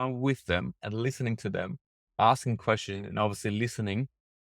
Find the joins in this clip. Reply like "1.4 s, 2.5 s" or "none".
2.2 s